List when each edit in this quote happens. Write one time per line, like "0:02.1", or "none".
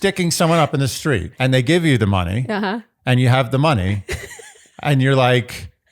0:01.3